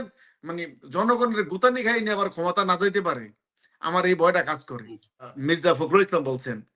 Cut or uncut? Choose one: cut